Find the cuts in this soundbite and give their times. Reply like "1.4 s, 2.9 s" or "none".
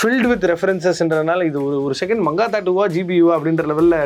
none